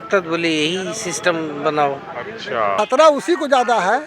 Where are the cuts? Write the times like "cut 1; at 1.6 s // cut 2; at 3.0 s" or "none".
cut 1; at 2.7 s